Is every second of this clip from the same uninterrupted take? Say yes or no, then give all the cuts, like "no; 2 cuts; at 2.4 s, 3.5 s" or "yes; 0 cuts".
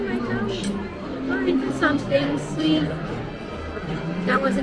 yes; 0 cuts